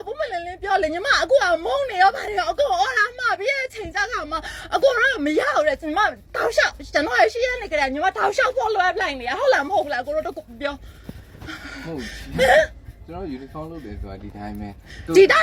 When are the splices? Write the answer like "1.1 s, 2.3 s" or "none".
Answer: none